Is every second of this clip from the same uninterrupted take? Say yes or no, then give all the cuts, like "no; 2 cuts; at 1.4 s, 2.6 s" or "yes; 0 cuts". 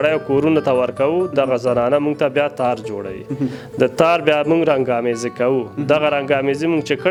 yes; 0 cuts